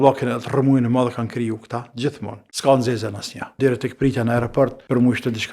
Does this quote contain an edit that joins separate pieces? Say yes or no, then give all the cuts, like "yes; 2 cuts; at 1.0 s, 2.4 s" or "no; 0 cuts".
yes; 1 cut; at 3.6 s